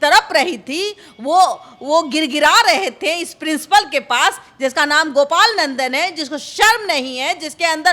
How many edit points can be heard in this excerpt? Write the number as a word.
zero